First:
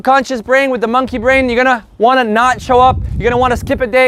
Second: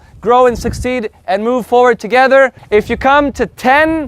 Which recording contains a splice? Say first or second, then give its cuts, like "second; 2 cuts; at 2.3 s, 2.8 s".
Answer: second; 1 cut; at 2.6 s